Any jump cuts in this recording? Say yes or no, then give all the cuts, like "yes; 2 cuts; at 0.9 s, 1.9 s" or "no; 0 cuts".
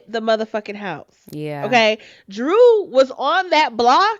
no; 0 cuts